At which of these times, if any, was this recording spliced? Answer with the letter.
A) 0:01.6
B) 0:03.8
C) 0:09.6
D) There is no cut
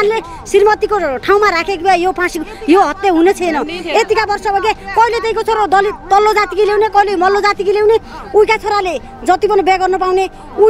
D